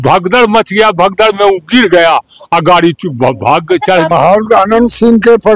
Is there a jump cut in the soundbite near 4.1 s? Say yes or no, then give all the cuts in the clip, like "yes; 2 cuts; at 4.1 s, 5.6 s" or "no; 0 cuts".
yes; 1 cut; at 4.1 s